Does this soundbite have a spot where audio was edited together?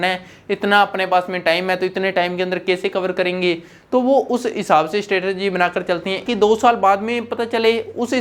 yes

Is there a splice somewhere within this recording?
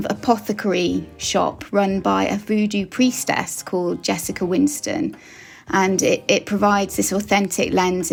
no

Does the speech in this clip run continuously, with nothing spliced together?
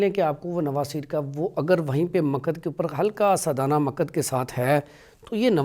yes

